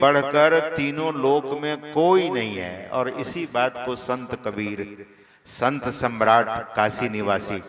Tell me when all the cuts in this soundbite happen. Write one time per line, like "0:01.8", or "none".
none